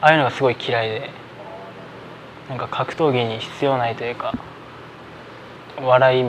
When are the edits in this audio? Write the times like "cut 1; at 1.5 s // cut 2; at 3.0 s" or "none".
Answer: cut 1; at 5.2 s